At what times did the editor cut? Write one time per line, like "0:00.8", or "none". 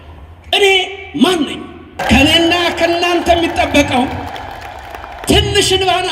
0:01.9